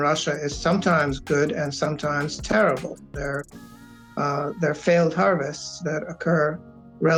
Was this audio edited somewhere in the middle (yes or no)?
no